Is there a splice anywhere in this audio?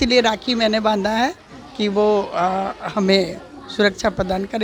no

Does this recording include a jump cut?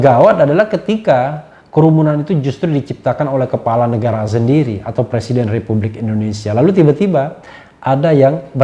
no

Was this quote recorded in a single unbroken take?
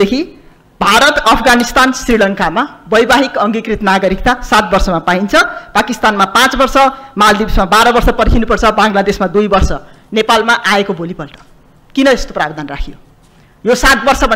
yes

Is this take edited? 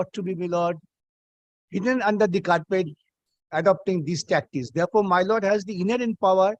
no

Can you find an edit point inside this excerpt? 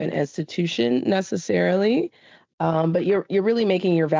yes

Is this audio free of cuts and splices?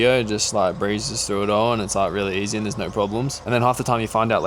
no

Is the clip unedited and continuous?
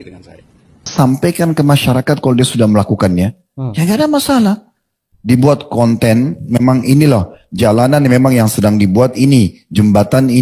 no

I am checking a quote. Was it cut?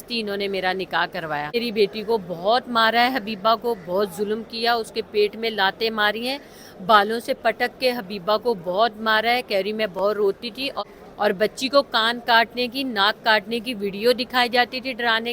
yes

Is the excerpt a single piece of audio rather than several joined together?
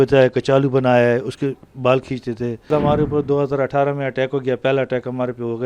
no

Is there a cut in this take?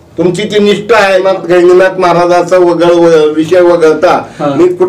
yes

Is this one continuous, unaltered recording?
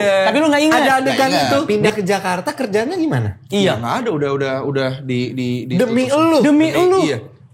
no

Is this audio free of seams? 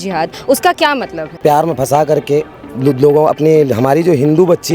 no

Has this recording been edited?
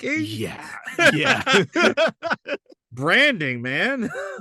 no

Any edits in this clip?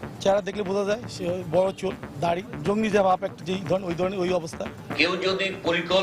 yes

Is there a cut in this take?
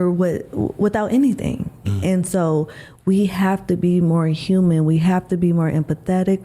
no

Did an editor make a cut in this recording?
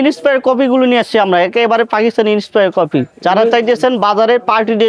no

